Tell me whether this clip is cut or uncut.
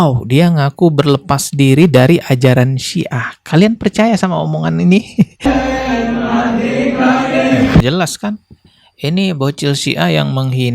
cut